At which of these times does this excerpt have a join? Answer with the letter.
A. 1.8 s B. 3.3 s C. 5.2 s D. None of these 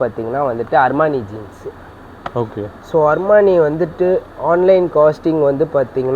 D